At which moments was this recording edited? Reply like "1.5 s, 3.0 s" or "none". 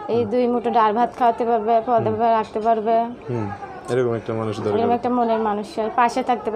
none